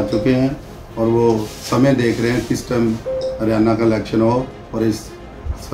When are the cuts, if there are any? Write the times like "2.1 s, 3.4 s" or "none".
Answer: none